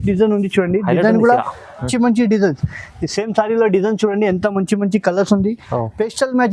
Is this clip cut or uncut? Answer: cut